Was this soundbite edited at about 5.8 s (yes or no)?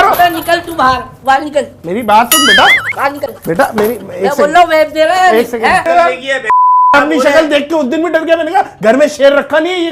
yes